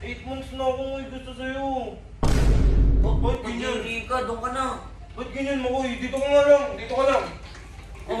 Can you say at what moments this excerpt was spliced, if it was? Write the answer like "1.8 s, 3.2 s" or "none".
2.1 s, 3.2 s